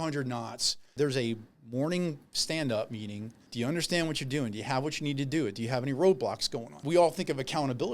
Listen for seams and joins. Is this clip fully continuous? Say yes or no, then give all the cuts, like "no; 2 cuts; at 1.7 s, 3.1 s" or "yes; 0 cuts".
no; 3 cuts; at 0.9 s, 3.4 s, 6.7 s